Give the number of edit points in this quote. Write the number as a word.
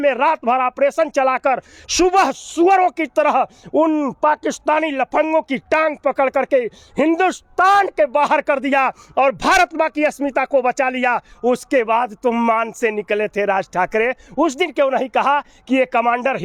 zero